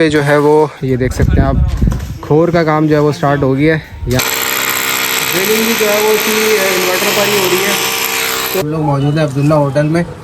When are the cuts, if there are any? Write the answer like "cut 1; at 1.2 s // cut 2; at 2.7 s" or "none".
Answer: cut 1; at 4.2 s // cut 2; at 8.6 s